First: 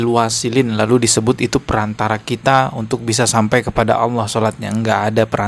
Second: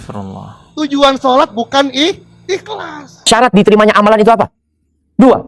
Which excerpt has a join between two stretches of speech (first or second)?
second